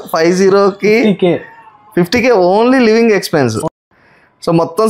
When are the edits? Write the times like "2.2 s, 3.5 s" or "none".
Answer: 3.6 s